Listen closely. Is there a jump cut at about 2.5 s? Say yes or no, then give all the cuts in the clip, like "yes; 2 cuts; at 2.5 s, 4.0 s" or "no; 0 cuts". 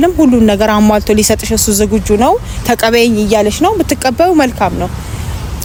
no; 0 cuts